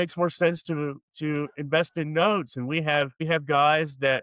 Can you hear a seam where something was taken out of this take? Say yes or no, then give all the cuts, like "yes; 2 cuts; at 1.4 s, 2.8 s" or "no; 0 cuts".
yes; 1 cut; at 3.2 s